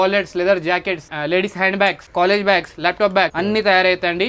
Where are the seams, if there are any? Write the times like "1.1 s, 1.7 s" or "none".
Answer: 3.3 s